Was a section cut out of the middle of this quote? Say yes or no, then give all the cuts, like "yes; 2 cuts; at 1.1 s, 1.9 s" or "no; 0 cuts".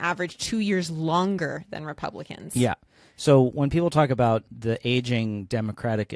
no; 0 cuts